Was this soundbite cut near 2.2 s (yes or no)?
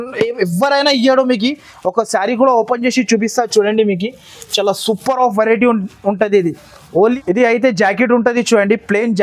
no